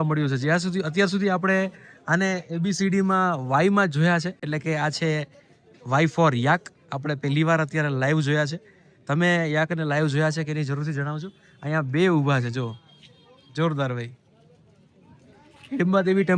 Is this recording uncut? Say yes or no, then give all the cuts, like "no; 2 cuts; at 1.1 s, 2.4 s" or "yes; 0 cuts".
yes; 0 cuts